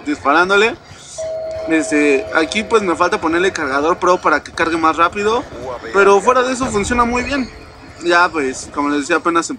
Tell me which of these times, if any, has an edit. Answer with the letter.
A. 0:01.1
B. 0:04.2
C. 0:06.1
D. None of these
D